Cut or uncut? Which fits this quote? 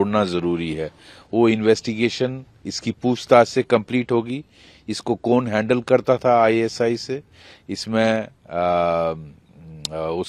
uncut